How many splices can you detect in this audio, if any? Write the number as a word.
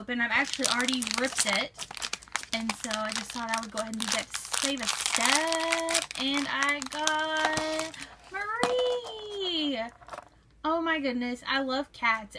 zero